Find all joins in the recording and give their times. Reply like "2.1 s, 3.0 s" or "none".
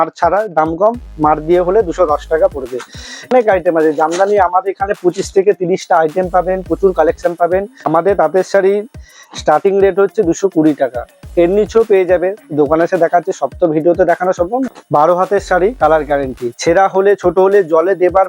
3.3 s, 7.9 s, 14.7 s